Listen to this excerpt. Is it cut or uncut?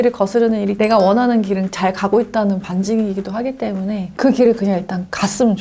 cut